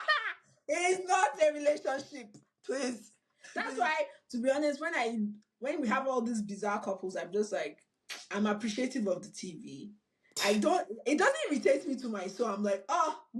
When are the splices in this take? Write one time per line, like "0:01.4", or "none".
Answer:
0:03.7